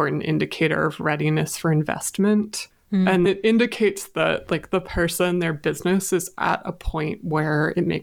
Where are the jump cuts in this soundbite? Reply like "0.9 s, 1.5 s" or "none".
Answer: 3.0 s

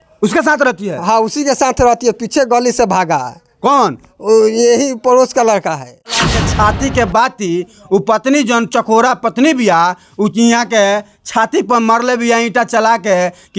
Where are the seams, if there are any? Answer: 6.3 s

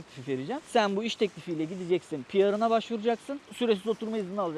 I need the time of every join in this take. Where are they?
3.3 s

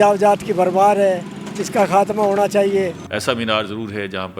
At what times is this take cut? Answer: 3.0 s

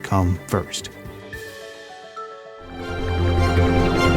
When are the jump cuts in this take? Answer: 2.7 s

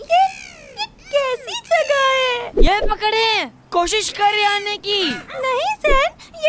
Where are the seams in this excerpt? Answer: 2.6 s, 5.3 s

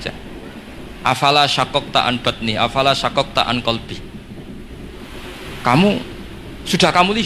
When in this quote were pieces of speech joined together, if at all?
3.8 s, 5.2 s

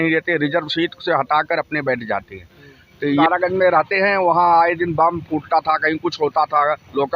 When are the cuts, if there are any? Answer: 3.2 s

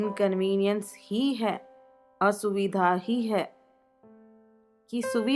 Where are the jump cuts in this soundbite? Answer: none

